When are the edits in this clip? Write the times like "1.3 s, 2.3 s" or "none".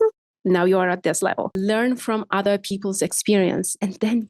1.5 s